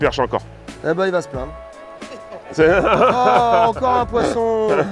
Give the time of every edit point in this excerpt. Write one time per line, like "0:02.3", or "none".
none

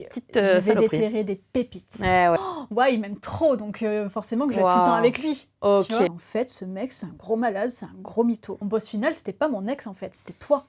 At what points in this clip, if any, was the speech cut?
0:02.4
0:06.2
0:08.6

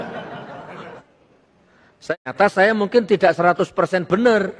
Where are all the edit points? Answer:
0:02.1

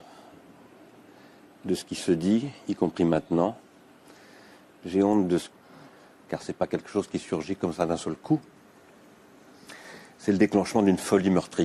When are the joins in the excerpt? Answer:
none

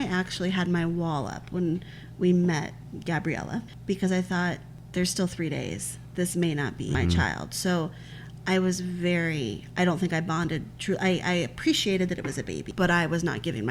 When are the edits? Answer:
0:03.7
0:04.7
0:07.0
0:12.6

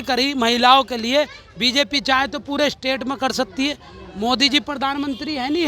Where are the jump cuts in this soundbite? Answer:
none

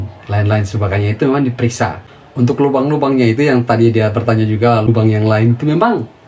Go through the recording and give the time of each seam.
0:02.1
0:04.9

